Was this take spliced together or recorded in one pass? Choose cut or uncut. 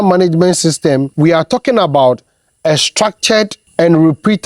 cut